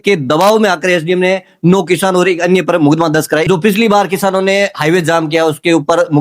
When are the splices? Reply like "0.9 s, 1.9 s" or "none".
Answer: 3.5 s